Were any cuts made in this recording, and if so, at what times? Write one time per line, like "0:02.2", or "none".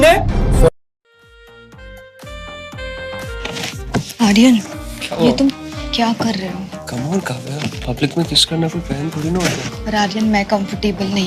0:02.6
0:03.1